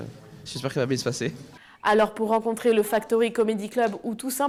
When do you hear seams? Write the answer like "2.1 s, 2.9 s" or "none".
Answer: none